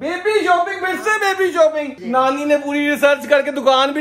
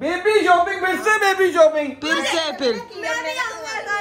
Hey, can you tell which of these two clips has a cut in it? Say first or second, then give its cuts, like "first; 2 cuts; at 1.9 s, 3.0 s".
first; 1 cut; at 2.0 s